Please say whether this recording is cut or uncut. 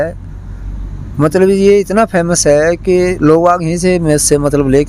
uncut